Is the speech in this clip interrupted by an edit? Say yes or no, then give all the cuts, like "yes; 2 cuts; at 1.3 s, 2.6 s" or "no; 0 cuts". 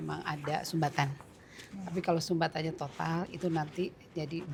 no; 0 cuts